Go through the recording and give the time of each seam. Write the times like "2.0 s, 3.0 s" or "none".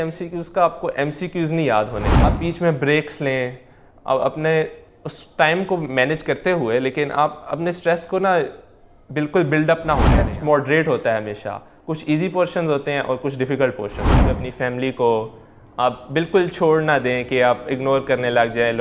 2.4 s, 10.3 s, 14.4 s